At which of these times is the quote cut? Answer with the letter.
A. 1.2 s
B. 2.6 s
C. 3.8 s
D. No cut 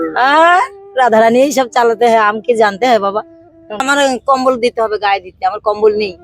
C